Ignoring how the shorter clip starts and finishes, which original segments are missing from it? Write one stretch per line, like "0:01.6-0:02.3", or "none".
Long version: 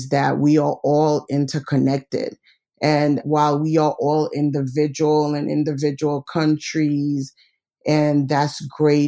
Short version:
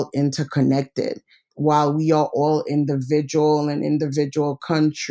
0:02.7-0:03.2